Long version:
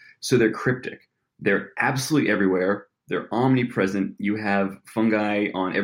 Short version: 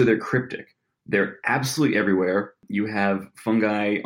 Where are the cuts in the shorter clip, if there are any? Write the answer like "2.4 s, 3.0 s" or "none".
2.6 s